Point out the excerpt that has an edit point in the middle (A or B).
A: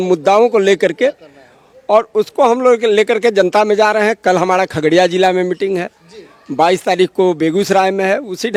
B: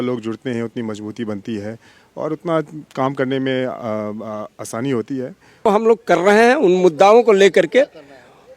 B